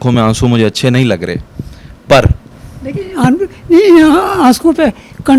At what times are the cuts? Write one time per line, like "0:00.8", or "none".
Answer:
none

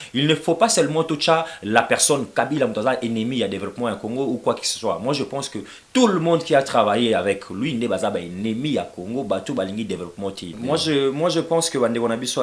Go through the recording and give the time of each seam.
0:10.6

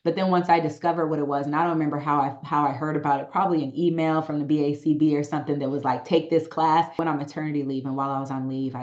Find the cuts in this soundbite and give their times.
0:07.0

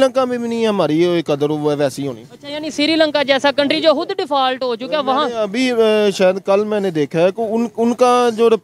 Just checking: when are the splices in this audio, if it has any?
none

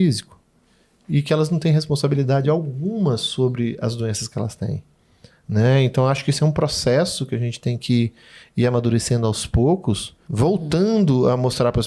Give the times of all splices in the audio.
0:10.2

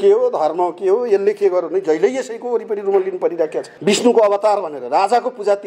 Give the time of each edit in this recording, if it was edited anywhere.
0:03.7

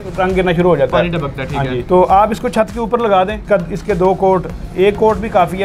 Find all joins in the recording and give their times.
0:01.8
0:03.4

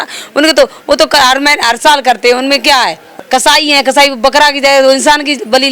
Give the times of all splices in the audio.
0:03.1

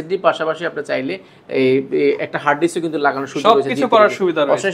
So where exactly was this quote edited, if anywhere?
none

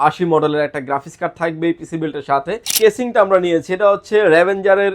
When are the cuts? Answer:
0:02.7

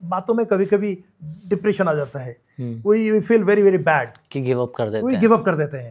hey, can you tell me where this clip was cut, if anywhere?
none

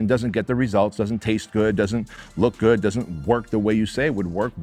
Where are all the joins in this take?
none

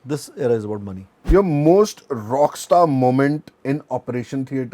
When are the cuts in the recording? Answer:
0:01.3
0:03.5

